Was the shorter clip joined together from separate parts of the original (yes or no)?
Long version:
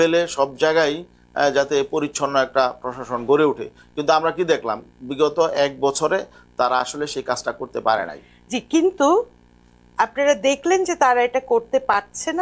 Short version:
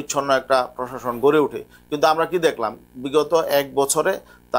no